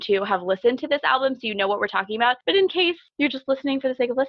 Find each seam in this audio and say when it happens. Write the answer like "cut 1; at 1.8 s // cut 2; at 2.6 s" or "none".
cut 1; at 2.7 s